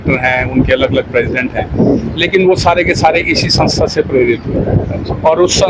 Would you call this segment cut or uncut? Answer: uncut